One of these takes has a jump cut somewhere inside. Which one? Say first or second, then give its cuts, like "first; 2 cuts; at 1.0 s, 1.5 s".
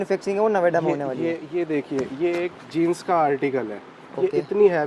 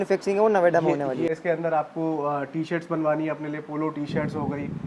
second; 1 cut; at 1.3 s